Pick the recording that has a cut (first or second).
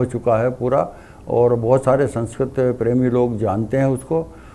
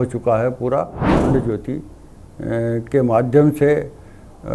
second